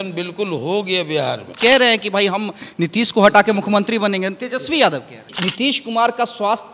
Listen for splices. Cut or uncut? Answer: cut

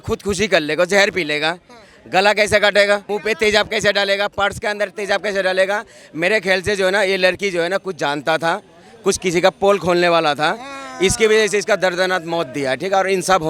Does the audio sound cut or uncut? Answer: cut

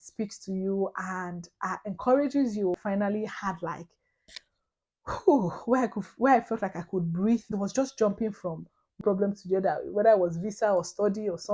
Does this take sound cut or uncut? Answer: cut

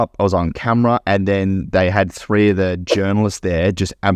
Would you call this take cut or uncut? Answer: uncut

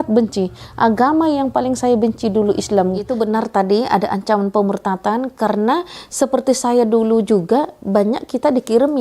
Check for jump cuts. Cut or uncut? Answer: cut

